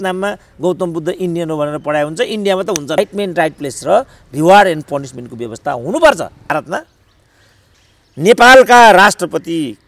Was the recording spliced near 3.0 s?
yes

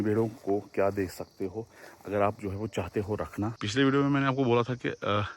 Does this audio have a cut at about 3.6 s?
yes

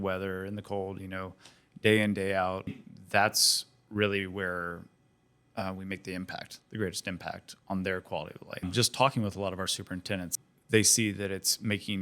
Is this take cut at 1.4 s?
no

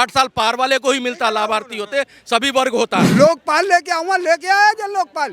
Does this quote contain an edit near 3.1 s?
yes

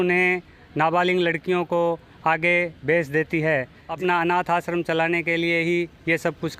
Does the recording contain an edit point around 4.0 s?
yes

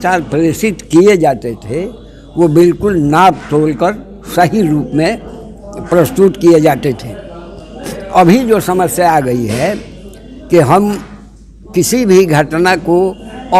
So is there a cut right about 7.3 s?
no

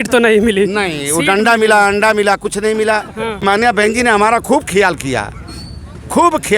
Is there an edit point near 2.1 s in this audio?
no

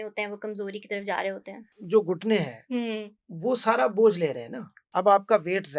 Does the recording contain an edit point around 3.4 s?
no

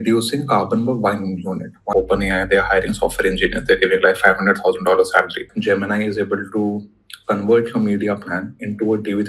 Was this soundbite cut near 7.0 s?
no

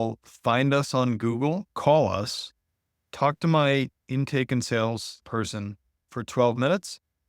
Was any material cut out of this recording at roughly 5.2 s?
yes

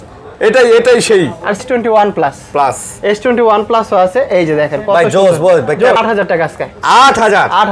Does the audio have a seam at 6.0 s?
yes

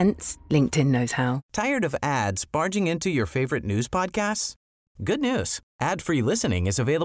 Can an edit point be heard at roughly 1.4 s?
yes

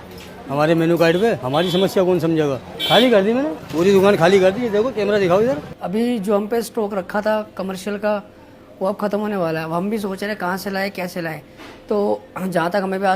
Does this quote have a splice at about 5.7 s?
yes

